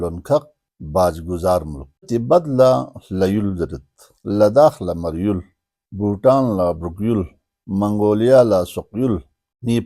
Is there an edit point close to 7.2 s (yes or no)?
no